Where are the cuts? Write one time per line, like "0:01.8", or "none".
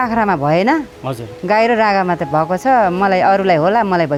none